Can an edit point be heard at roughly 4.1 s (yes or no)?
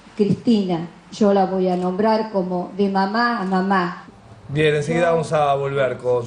no